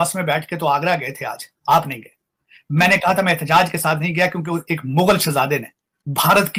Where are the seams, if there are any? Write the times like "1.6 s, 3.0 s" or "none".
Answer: none